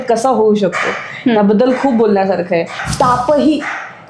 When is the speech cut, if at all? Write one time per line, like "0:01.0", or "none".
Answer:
0:02.8